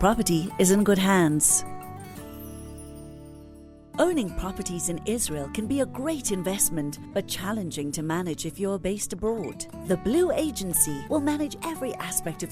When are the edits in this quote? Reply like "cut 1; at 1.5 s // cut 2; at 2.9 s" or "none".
cut 1; at 1.4 s // cut 2; at 3.8 s